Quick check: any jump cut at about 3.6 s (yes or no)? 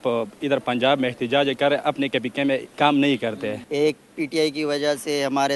yes